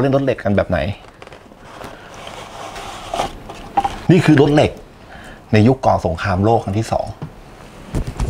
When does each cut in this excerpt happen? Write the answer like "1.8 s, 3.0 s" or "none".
none